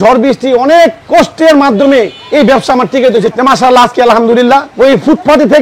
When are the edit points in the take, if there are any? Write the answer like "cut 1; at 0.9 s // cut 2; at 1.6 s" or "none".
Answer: cut 1; at 1.0 s // cut 2; at 3.3 s // cut 3; at 4.7 s